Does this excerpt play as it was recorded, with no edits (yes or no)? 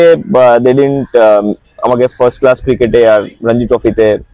yes